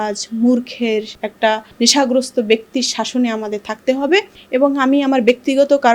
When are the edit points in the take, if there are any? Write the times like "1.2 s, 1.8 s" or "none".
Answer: 1.5 s, 4.4 s